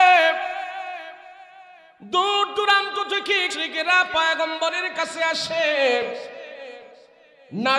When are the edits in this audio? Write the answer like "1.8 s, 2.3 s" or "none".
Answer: 3.5 s